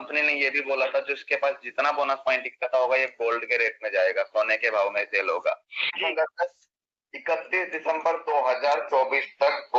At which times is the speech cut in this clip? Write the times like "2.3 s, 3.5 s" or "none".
6.0 s